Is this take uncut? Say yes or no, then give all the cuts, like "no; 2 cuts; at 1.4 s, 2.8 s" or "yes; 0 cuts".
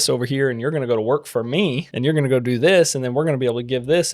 no; 1 cut; at 1.9 s